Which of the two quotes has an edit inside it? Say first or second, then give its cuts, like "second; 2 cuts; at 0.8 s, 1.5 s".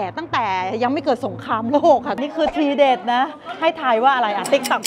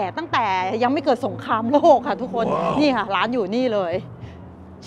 first; 1 cut; at 2.2 s